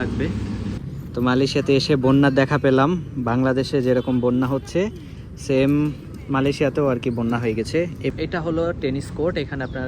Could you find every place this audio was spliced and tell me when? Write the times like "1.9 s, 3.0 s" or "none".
0.8 s, 8.1 s